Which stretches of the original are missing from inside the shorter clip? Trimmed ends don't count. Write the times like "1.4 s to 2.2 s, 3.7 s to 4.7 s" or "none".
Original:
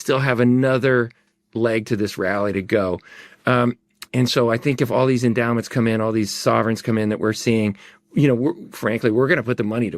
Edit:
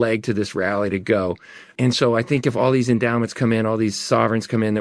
3.2 s to 3.9 s